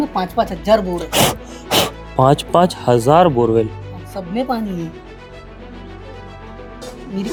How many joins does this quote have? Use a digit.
0